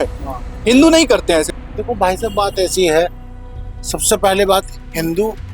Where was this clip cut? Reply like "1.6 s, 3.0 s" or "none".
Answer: 1.5 s